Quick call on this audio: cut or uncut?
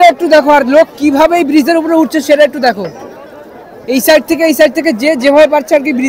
uncut